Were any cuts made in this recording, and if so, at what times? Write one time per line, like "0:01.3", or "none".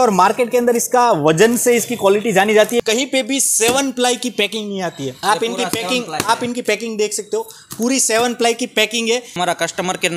0:02.8
0:05.1
0:09.4